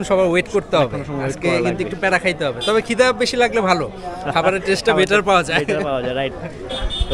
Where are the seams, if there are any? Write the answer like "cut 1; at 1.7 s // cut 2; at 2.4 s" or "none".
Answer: none